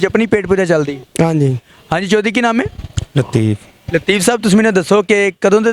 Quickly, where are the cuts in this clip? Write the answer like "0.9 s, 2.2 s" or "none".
1.7 s